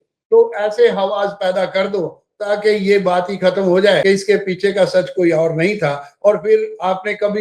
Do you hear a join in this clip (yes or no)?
yes